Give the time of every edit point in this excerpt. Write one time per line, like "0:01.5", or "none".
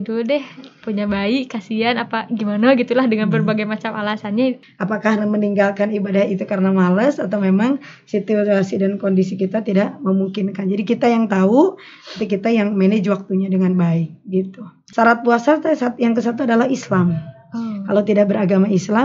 0:04.7
0:14.8